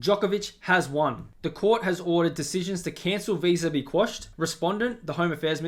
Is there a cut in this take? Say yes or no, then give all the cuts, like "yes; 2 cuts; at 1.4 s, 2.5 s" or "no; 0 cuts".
no; 0 cuts